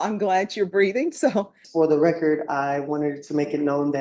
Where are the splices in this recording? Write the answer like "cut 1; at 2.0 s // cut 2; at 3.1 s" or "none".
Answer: cut 1; at 1.6 s